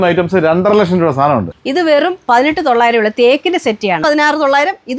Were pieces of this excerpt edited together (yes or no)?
yes